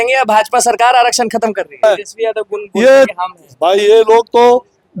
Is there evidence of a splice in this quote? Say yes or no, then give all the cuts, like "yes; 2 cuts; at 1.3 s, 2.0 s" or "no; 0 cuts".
yes; 1 cut; at 1.8 s